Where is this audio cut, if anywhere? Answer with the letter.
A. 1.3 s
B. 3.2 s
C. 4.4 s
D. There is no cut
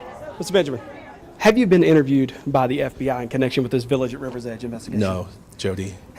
A